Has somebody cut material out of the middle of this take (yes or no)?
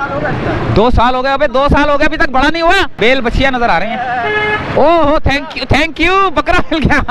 yes